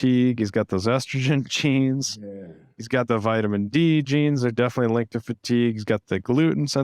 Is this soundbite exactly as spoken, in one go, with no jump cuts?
yes; 0 cuts

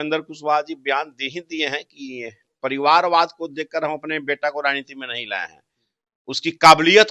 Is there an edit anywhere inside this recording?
no; 0 cuts

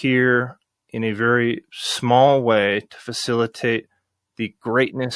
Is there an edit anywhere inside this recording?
no; 0 cuts

